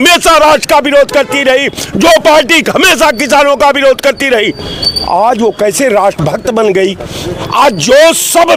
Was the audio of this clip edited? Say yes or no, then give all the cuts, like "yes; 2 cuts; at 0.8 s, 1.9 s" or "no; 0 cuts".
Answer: no; 0 cuts